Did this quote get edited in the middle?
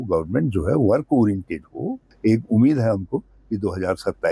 yes; 1 cut; at 2.0 s

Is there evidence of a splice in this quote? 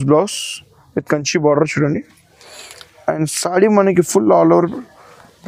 no; 0 cuts

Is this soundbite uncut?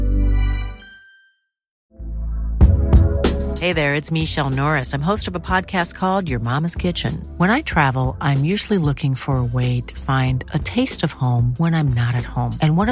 no; 1 cut; at 1.8 s

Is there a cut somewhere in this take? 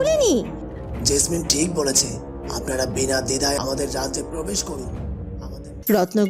yes; 1 cut; at 5.4 s

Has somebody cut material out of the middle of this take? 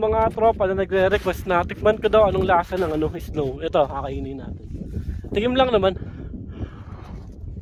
no; 0 cuts

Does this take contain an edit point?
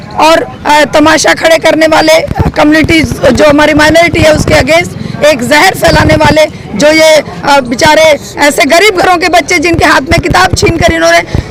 no; 0 cuts

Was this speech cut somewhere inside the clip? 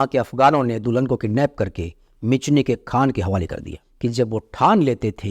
yes; 1 cut; at 3.9 s

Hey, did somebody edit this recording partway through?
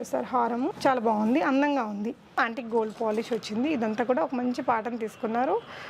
yes; 1 cut; at 2.4 s

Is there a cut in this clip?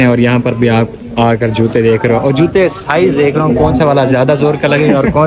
no; 0 cuts

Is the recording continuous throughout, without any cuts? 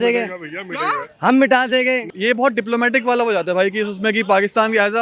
no; 1 cut; at 2.1 s

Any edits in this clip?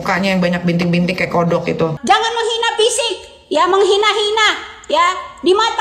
yes; 1 cut; at 2.0 s

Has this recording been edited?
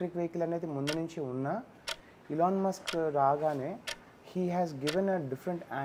no; 0 cuts

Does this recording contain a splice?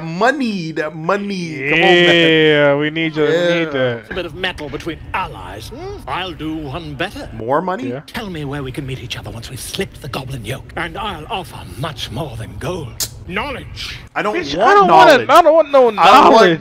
no; 0 cuts

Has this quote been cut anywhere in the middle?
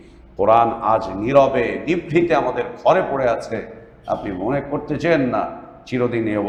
no; 0 cuts

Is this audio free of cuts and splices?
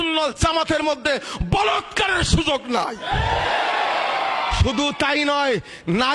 yes; 0 cuts

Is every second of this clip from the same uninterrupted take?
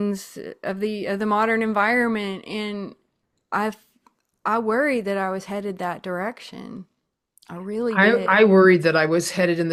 yes; 0 cuts

